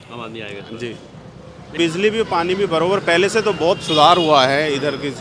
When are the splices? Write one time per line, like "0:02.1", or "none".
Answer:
0:01.7